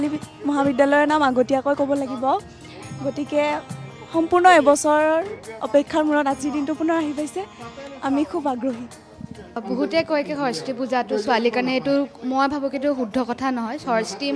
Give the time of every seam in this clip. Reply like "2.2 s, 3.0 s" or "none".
9.6 s